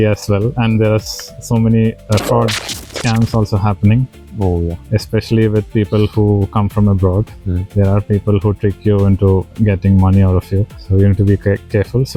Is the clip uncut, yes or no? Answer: yes